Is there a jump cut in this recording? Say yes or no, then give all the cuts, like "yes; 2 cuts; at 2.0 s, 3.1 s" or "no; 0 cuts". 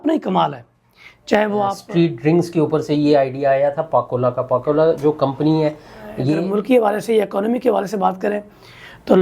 yes; 2 cuts; at 1.8 s, 6.3 s